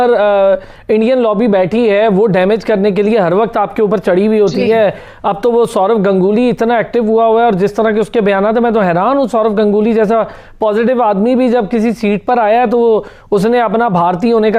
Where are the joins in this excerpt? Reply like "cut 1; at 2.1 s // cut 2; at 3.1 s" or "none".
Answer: none